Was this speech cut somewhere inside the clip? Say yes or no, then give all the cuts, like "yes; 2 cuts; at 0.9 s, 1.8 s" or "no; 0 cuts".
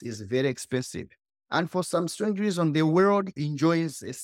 no; 0 cuts